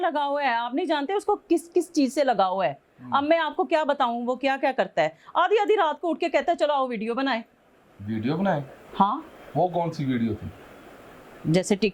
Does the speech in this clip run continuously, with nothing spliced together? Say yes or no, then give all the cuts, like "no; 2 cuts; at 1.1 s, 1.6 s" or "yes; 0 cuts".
yes; 0 cuts